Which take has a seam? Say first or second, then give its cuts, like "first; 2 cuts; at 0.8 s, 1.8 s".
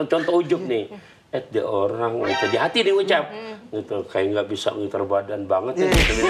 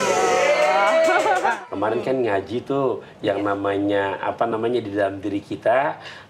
second; 1 cut; at 1.6 s